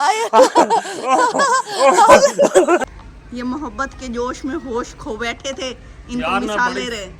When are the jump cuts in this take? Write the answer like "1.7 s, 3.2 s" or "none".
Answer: 2.8 s